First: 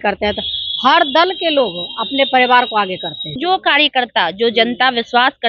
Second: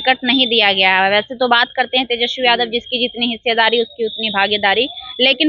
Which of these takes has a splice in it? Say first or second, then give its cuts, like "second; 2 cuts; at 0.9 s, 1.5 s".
first; 1 cut; at 3.4 s